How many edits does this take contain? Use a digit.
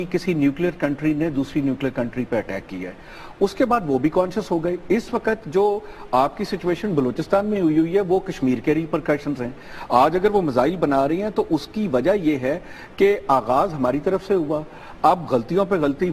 0